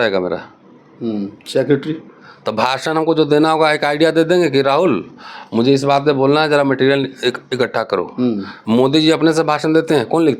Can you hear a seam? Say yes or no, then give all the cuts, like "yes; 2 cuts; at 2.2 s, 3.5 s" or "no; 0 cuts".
no; 0 cuts